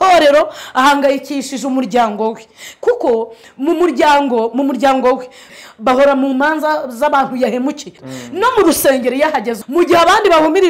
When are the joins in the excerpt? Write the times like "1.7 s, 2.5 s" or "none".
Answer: 5.4 s, 8.0 s, 9.6 s